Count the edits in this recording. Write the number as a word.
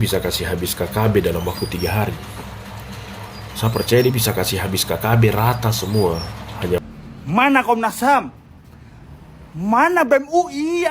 one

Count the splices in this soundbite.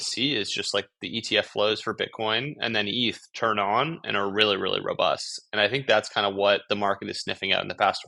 zero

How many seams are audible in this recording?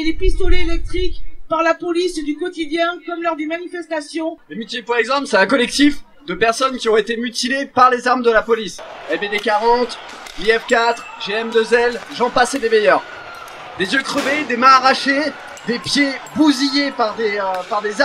one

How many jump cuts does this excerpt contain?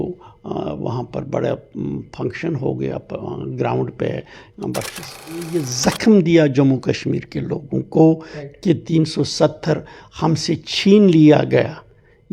one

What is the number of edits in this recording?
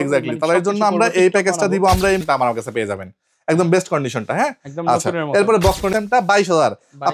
two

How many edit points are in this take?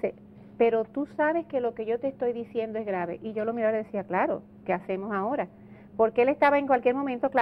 zero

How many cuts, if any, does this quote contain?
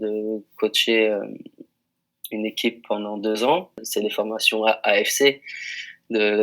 one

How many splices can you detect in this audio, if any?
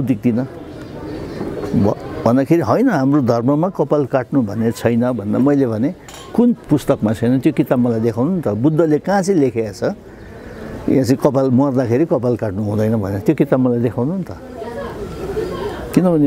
zero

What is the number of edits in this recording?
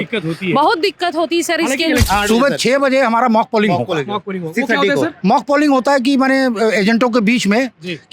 one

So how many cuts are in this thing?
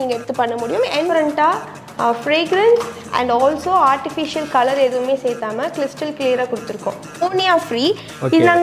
two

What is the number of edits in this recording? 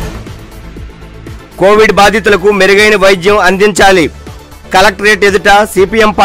one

